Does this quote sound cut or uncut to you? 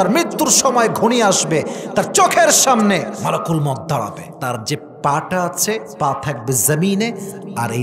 cut